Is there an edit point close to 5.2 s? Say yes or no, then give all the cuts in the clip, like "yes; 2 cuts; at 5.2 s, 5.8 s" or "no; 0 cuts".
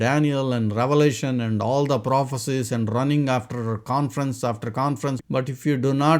yes; 1 cut; at 5.2 s